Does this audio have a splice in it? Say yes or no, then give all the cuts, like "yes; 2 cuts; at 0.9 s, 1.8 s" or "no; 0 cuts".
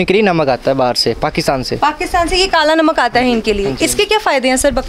yes; 1 cut; at 1.7 s